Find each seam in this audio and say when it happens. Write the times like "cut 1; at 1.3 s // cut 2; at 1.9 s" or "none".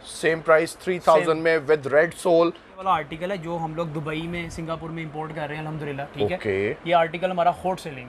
cut 1; at 2.7 s

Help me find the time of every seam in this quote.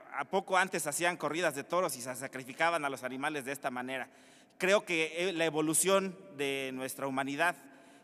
cut 1; at 5.0 s

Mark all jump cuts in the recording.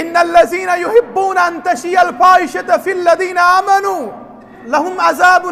cut 1; at 4.6 s

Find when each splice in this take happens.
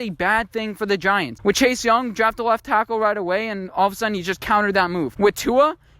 cut 1; at 1.3 s // cut 2; at 5.1 s

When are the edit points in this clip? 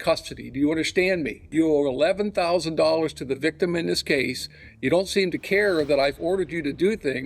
cut 1; at 1.4 s

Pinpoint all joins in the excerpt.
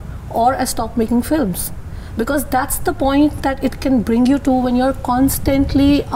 none

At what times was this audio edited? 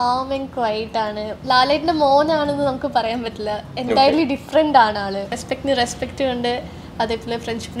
cut 1; at 1.3 s // cut 2; at 5.4 s

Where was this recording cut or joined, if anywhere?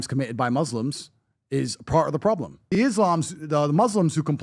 cut 1; at 2.6 s

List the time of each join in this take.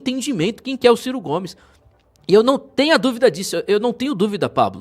none

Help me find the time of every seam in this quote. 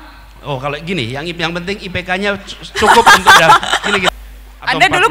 cut 1; at 4.1 s

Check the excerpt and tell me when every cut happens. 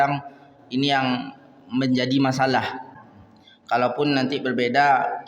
cut 1; at 3.0 s

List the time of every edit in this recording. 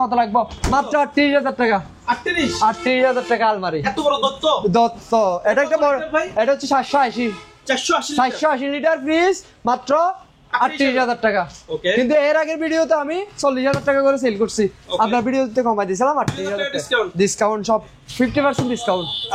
none

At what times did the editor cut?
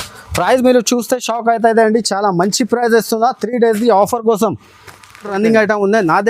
cut 1; at 5.3 s

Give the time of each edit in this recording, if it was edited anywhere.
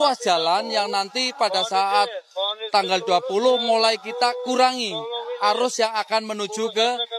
none

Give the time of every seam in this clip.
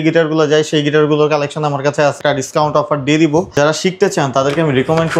cut 1; at 2.2 s // cut 2; at 3.5 s

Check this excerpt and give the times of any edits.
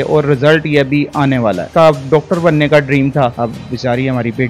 cut 1; at 1.6 s // cut 2; at 3.3 s

